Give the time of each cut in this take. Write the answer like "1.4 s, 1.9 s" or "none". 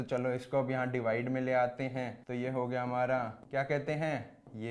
2.2 s, 3.4 s